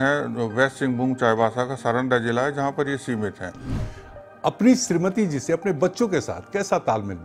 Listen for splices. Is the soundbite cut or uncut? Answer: cut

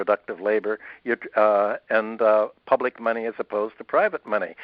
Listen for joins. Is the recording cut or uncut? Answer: uncut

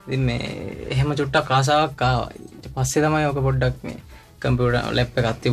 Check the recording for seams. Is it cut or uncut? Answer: uncut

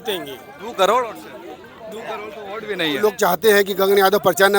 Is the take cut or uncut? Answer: cut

